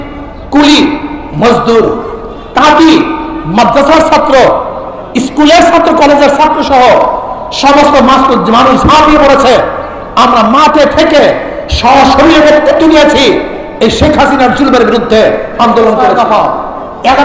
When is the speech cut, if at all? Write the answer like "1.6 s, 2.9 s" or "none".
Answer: 16.0 s